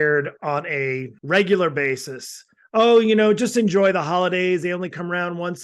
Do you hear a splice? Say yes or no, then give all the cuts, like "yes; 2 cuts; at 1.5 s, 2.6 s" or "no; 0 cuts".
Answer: no; 0 cuts